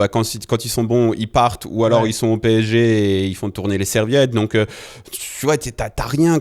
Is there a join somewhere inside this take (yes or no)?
no